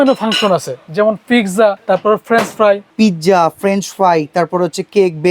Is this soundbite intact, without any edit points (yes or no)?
no